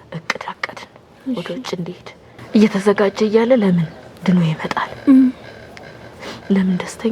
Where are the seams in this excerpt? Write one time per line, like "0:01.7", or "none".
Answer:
0:02.3